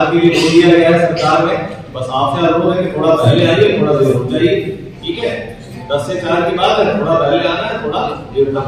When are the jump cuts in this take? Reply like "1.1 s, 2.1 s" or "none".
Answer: none